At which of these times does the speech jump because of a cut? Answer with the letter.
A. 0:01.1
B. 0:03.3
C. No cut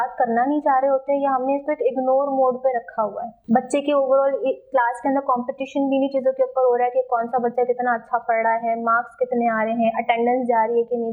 B